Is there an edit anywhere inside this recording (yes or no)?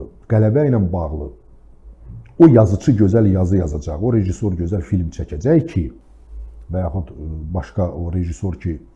no